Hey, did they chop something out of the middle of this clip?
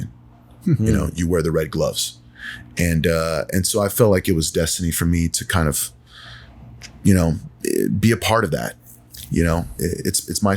yes; 2 cuts; at 7.5 s, 8.8 s

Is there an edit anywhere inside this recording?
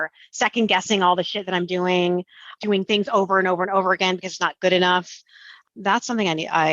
yes; 1 cut; at 2.6 s

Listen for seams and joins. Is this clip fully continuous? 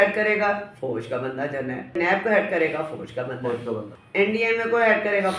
no; 2 cuts; at 1.9 s, 4.0 s

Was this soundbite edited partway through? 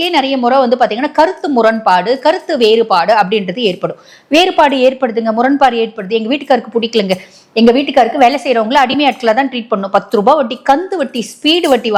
no; 0 cuts

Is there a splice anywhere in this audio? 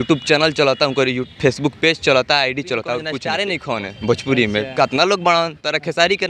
yes; 1 cut; at 3.2 s

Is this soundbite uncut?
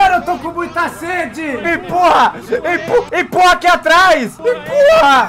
yes; 0 cuts

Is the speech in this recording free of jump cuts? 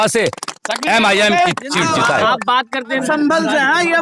no; 1 cut; at 3.0 s

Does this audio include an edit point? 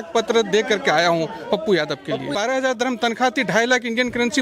yes; 1 cut; at 2.3 s

